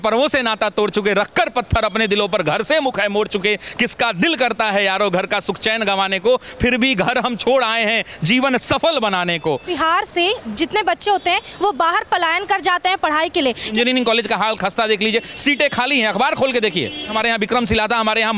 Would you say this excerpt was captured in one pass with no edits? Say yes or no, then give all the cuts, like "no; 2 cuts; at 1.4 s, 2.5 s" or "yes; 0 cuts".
no; 3 cuts; at 9.7 s, 13.7 s, 17.1 s